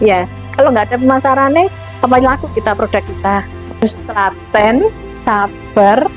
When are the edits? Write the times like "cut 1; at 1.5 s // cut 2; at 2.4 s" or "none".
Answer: cut 1; at 3.8 s